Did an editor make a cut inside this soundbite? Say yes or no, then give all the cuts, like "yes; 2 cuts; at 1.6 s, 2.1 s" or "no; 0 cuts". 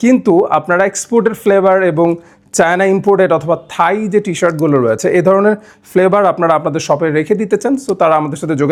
no; 0 cuts